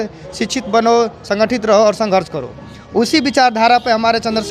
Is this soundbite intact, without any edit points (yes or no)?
yes